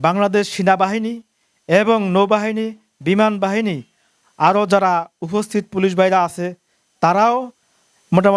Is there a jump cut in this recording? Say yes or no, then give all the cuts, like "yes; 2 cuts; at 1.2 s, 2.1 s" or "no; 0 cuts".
no; 0 cuts